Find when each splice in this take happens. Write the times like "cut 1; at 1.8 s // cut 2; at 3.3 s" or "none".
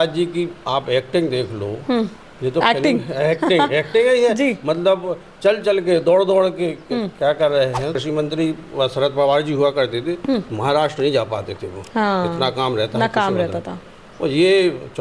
cut 1; at 8.0 s